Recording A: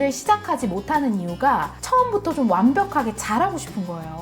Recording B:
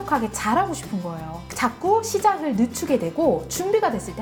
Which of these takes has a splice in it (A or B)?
A